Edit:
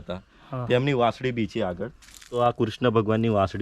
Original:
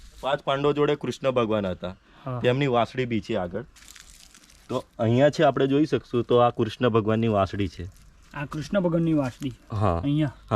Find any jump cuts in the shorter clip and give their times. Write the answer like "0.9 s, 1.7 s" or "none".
2.4 s